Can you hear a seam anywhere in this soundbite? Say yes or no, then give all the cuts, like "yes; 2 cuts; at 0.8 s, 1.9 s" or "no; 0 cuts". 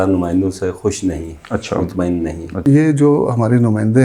yes; 1 cut; at 2.6 s